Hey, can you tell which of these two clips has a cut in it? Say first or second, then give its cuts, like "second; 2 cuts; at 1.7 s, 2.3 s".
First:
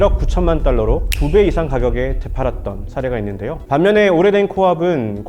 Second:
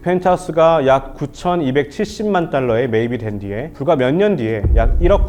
first; 1 cut; at 3.5 s